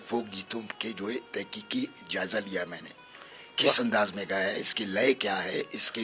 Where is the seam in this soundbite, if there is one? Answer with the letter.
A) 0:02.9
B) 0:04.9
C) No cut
C